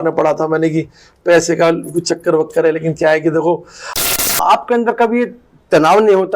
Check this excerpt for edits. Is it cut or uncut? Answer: cut